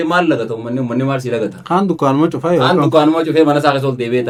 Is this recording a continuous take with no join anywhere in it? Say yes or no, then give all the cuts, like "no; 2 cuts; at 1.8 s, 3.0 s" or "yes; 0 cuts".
yes; 0 cuts